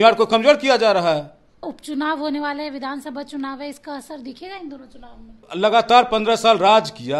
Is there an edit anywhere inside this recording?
yes; 2 cuts; at 1.6 s, 5.4 s

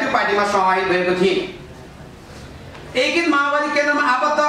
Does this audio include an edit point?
no; 0 cuts

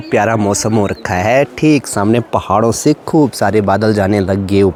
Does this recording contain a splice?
no; 0 cuts

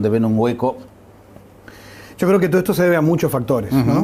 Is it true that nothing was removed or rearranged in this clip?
yes; 0 cuts

